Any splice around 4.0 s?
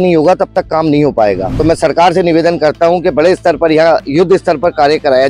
no; 1 cut; at 1.5 s

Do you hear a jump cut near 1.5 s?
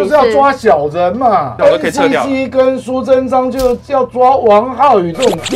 yes; 1 cut; at 1.5 s

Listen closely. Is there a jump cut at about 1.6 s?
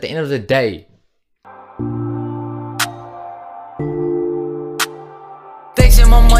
yes; 1 cut; at 1.6 s

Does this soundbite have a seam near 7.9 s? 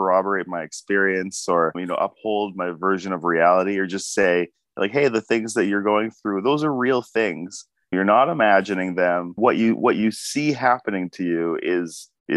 yes; 2 cuts; at 7.9 s, 9.3 s

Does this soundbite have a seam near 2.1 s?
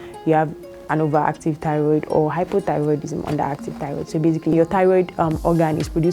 no; 1 cut; at 4.5 s

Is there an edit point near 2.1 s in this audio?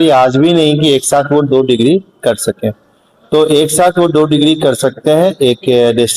no; 0 cuts

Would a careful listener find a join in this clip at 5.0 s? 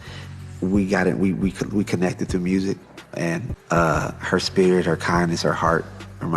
yes; 1 cut; at 5.0 s

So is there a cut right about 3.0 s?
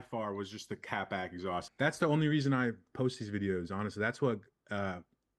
no; 1 cut; at 1.7 s

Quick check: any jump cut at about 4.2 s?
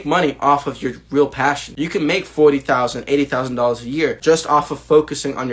yes; 2 cuts; at 1.7 s, 4.2 s

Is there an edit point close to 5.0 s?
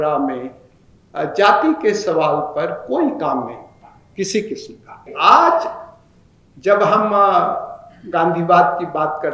yes; 1 cut; at 5.0 s

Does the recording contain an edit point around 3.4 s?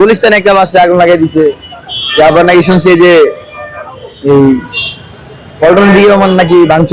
no; 0 cuts

